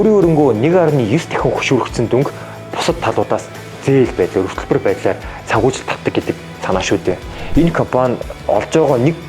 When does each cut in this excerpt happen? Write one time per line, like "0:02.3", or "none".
0:07.3

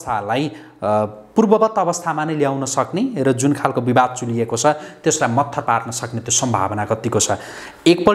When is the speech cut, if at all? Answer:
none

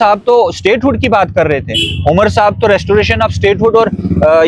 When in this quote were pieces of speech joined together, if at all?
none

